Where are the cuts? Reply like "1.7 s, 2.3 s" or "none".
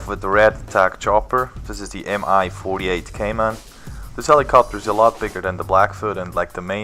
1.1 s